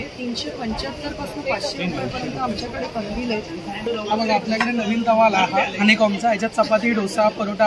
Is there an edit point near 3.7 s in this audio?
yes; 1 cut; at 3.7 s

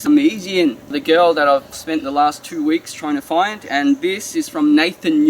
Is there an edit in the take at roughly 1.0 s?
yes; 2 cuts; at 1.0 s, 1.7 s

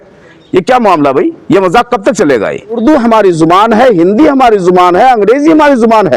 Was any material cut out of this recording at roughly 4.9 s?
no; 1 cut; at 2.8 s

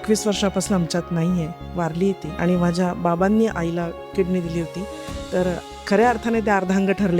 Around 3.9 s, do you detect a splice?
no; 1 cut; at 2.3 s

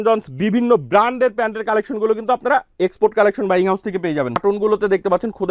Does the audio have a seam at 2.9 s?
no; 1 cut; at 4.4 s

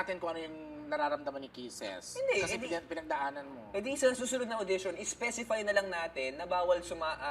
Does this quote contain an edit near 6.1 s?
no; 1 cut; at 3.0 s

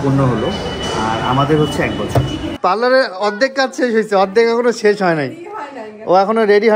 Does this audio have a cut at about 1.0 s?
no; 1 cut; at 2.5 s

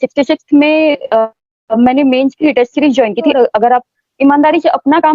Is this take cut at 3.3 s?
yes; 1 cut; at 3.3 s

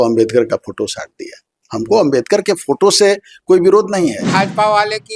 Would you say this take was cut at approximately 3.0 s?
no; 1 cut; at 4.2 s

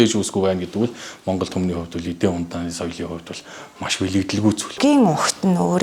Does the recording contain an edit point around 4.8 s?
yes; 1 cut; at 4.8 s

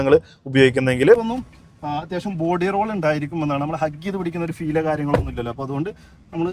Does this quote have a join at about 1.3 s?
yes; 1 cut; at 1.3 s

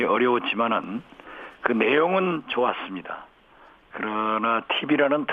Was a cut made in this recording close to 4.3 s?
no; 1 cut; at 2.8 s

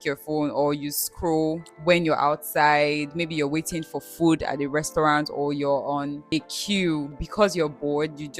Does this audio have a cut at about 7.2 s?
yes; 3 cuts; at 1.7 s, 6.2 s, 7.2 s

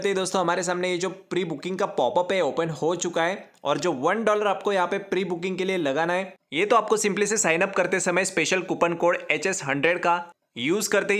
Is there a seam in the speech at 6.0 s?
no; 0 cuts

